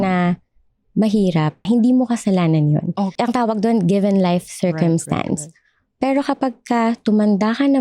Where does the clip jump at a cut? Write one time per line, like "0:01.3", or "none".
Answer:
0:01.6
0:03.1